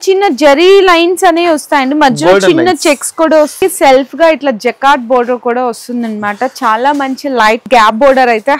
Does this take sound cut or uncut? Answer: cut